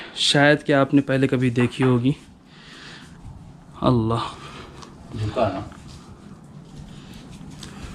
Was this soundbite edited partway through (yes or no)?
no